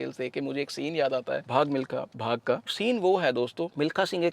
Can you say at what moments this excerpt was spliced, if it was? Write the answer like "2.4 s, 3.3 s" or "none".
2.6 s